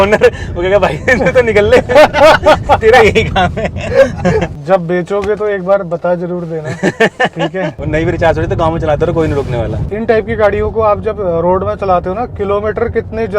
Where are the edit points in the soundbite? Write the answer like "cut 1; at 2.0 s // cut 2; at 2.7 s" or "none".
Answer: cut 1; at 4.5 s // cut 2; at 7.8 s // cut 3; at 9.8 s